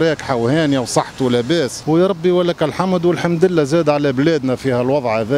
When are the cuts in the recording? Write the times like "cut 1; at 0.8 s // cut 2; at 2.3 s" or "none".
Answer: cut 1; at 1.8 s

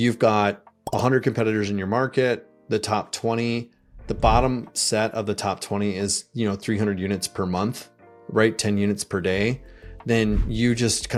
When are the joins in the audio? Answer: none

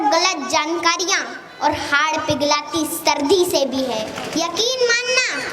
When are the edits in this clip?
cut 1; at 4.2 s

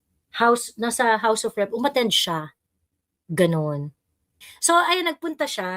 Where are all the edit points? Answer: cut 1; at 4.5 s

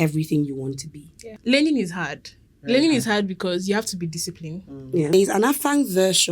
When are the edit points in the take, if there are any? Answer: cut 1; at 1.3 s // cut 2; at 5.1 s

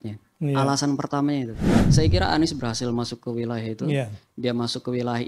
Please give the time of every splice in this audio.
cut 1; at 1.8 s

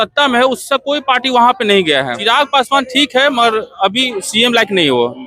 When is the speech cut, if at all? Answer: cut 1; at 2.1 s

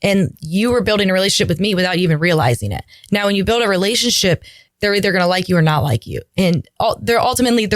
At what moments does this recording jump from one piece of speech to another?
cut 1; at 4.6 s

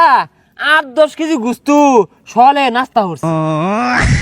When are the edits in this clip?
cut 1; at 3.3 s

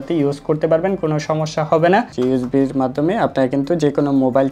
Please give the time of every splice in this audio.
cut 1; at 2.1 s

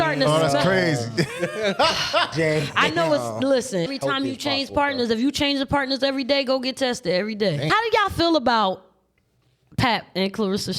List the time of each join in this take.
cut 1; at 3.9 s // cut 2; at 7.7 s

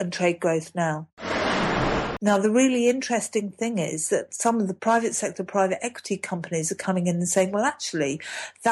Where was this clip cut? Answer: cut 1; at 1.6 s

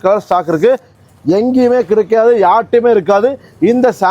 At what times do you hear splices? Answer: cut 1; at 0.9 s

